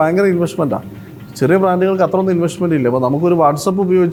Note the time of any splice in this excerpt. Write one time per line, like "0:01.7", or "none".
none